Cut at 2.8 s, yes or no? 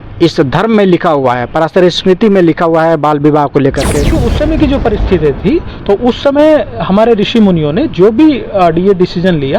no